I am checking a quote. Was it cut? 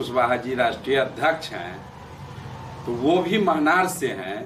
no; 0 cuts

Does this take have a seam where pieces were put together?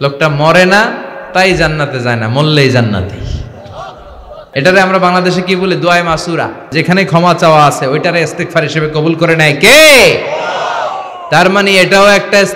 yes; 2 cuts; at 4.4 s, 6.7 s

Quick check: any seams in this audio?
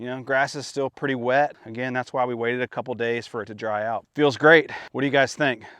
yes; 3 cuts; at 1.7 s, 4.1 s, 4.8 s

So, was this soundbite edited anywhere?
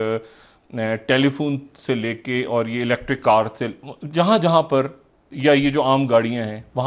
no; 0 cuts

